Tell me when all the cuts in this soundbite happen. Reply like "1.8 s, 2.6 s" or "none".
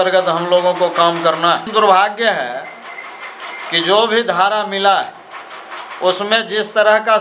1.7 s